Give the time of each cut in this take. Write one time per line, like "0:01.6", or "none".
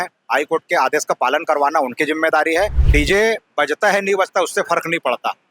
0:02.8

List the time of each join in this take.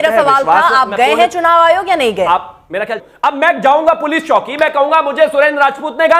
0:03.0

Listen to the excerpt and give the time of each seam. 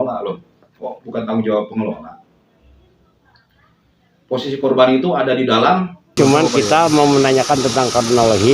0:06.1

